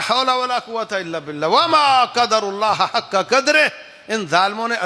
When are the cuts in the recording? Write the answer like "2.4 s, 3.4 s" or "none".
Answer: none